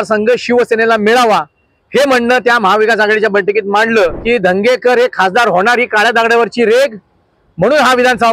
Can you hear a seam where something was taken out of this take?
yes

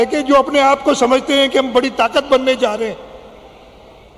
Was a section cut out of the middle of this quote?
no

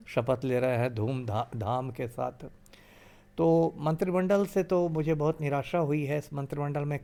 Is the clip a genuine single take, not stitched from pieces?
yes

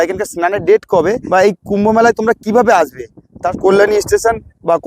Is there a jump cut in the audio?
yes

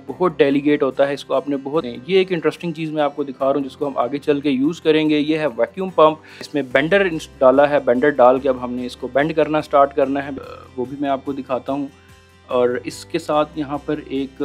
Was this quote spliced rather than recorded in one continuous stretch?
yes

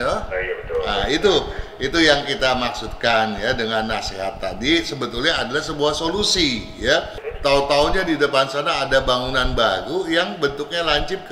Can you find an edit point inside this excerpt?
yes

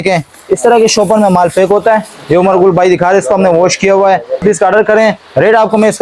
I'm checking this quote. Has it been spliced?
yes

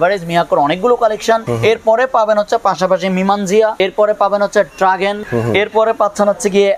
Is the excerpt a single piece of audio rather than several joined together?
no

